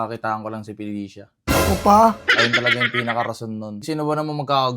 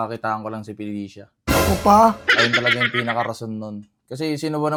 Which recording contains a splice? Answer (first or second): first